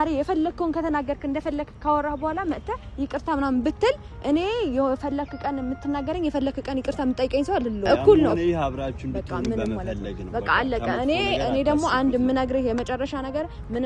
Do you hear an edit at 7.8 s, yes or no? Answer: yes